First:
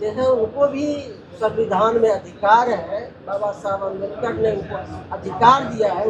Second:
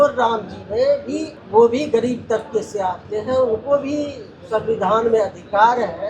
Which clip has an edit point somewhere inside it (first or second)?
second